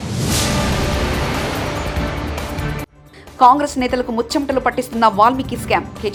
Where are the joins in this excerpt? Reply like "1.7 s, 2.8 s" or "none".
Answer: none